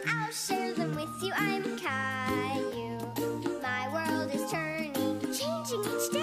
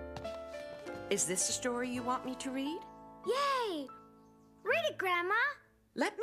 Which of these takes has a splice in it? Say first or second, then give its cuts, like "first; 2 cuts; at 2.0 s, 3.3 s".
second; 1 cut; at 3.3 s